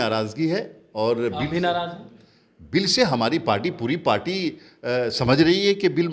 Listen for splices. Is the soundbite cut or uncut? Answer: uncut